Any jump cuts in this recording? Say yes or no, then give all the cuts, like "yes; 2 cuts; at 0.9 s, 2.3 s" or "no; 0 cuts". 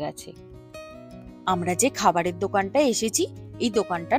no; 0 cuts